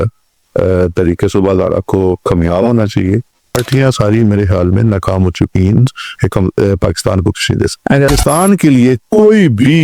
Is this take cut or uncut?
cut